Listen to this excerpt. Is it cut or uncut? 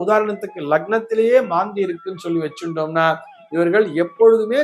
uncut